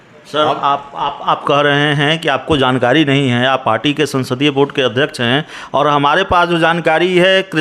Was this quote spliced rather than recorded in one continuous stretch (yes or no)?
no